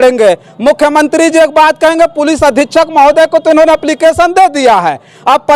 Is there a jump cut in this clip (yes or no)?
no